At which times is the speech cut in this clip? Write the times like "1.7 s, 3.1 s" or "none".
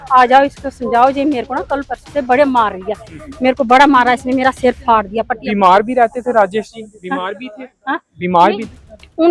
none